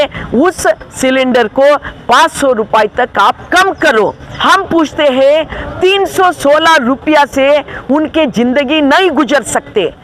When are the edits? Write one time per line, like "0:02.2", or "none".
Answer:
0:04.3